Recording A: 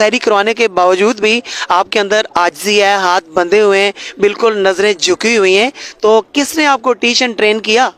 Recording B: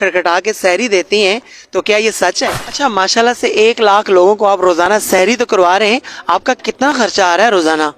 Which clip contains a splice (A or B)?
B